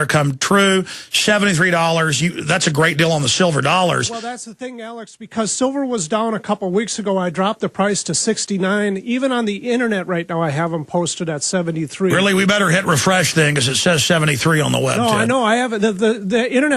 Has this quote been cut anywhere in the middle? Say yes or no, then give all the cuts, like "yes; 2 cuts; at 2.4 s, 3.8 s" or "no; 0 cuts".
no; 0 cuts